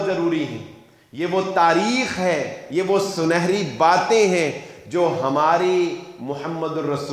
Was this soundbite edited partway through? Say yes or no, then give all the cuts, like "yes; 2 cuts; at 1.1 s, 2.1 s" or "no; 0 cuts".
no; 0 cuts